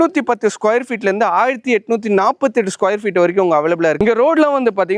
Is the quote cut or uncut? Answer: cut